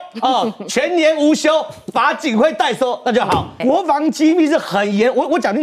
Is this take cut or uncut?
cut